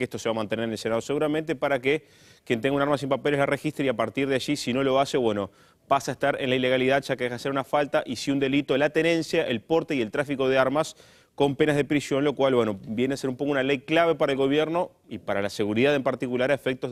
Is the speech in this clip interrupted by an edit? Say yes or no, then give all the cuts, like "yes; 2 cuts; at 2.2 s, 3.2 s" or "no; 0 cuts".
no; 0 cuts